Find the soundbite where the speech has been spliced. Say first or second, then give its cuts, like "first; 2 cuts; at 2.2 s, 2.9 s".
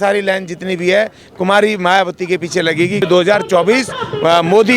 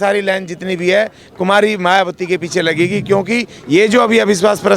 first; 1 cut; at 3.0 s